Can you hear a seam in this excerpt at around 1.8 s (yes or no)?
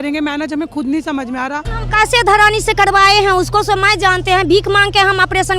yes